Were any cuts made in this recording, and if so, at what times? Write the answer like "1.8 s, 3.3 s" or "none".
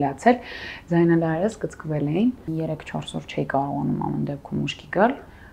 2.5 s